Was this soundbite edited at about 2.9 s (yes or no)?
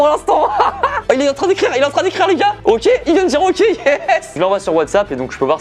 no